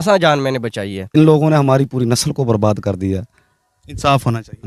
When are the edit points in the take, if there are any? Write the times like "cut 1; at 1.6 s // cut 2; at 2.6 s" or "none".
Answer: cut 1; at 1.1 s